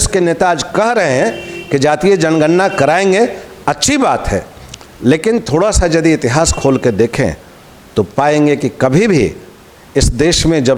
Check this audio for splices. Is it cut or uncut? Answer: uncut